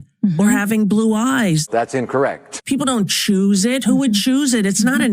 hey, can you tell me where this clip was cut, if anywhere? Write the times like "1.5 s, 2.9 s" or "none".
1.6 s, 2.6 s